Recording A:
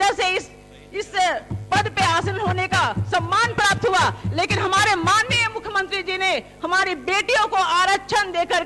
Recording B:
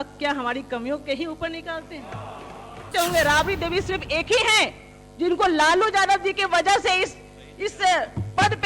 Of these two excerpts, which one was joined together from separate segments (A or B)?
B